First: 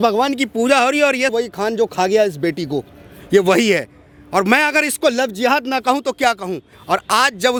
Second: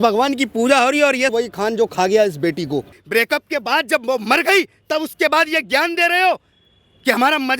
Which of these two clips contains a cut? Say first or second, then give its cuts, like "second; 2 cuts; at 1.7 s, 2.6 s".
second; 1 cut; at 3.0 s